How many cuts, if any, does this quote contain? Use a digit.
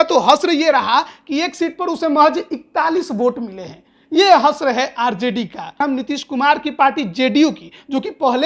1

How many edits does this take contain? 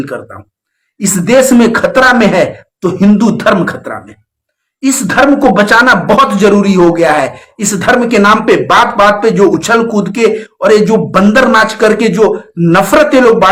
0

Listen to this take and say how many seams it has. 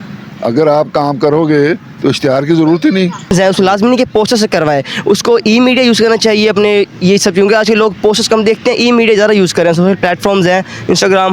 1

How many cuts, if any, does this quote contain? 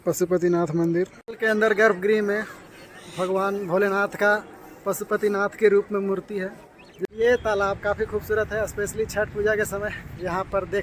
2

